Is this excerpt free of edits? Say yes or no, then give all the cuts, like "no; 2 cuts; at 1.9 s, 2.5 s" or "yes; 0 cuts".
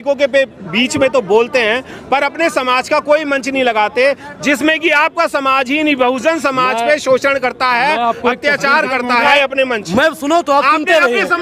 no; 1 cut; at 9.3 s